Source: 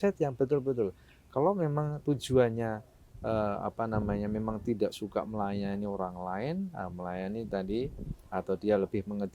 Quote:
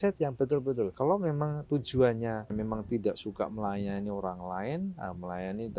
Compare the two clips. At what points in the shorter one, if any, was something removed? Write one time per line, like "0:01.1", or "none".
0:00.9
0:02.5